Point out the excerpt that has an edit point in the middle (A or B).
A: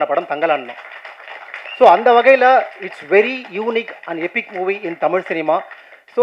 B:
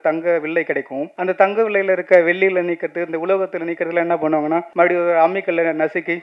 B